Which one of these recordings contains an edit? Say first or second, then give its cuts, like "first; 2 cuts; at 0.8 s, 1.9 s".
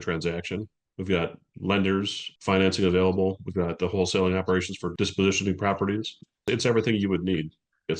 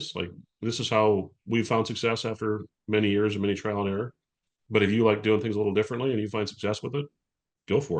first; 1 cut; at 4.9 s